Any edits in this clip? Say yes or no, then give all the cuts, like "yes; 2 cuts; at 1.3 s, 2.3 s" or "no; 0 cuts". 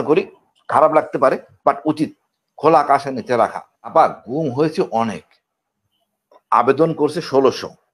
yes; 1 cut; at 3.9 s